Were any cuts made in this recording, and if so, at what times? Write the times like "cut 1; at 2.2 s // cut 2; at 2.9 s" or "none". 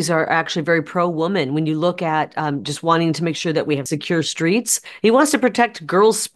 cut 1; at 3.9 s // cut 2; at 4.8 s